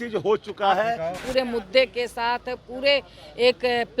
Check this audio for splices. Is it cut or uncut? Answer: cut